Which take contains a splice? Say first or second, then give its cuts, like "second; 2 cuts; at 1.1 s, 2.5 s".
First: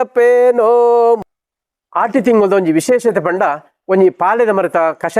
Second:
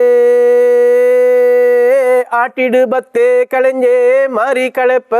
first; 1 cut; at 1.2 s